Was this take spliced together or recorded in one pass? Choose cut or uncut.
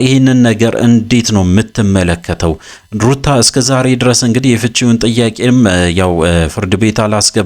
uncut